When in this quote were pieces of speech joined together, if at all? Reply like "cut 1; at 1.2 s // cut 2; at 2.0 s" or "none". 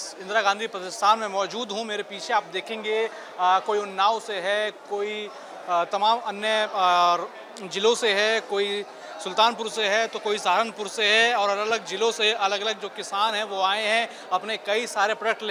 none